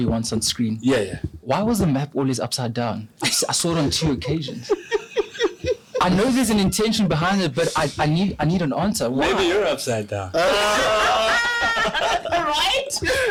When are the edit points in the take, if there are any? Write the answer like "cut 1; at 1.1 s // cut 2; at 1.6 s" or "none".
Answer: none